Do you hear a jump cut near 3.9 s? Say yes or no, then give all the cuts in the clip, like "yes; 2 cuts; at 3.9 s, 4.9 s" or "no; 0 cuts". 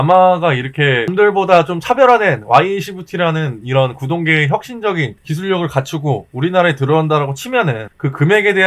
no; 1 cut; at 1.1 s